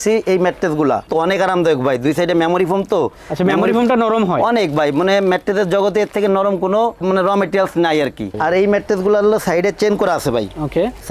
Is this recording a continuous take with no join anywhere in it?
no; 2 cuts; at 1.1 s, 8.3 s

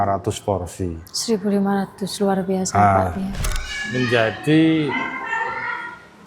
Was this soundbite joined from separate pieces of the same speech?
yes; 1 cut; at 3.4 s

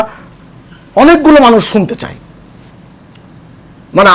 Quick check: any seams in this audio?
yes; 1 cut; at 2.7 s

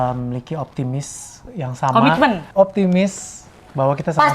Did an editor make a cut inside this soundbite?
yes; 1 cut; at 2.4 s

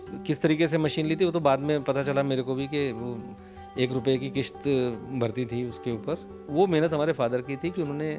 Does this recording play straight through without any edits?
no; 1 cut; at 6.3 s

